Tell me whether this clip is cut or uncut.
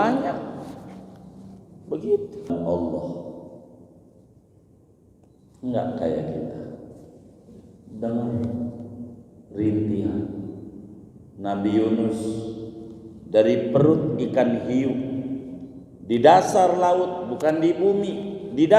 cut